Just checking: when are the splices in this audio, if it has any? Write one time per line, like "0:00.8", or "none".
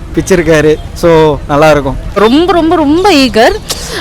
0:02.2